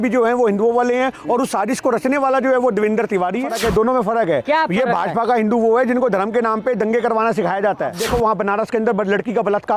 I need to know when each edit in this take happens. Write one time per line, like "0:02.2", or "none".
0:03.5
0:08.0